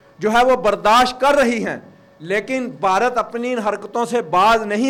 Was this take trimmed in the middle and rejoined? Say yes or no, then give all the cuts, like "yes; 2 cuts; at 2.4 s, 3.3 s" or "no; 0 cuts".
no; 0 cuts